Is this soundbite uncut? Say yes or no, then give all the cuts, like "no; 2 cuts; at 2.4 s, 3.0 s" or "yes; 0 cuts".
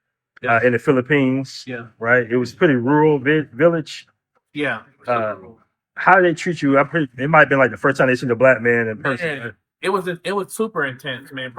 yes; 0 cuts